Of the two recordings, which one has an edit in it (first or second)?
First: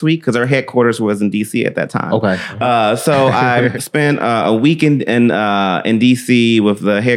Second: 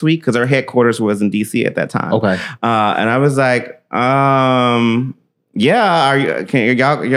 first